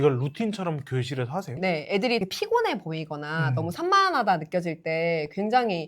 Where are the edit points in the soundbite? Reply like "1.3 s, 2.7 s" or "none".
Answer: 2.2 s